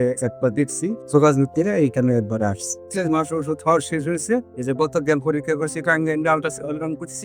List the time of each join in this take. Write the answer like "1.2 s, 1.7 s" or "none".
1.0 s, 2.8 s